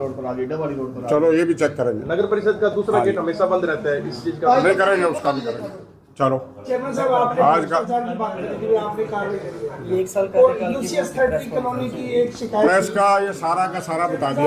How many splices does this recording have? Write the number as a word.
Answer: zero